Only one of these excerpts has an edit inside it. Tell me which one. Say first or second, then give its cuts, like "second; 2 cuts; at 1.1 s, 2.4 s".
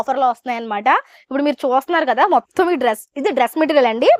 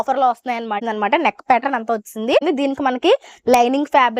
second; 2 cuts; at 0.8 s, 2.4 s